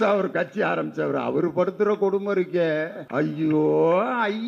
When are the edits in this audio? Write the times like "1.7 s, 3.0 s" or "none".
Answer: 3.0 s